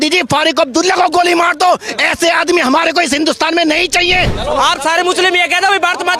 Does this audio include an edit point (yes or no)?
yes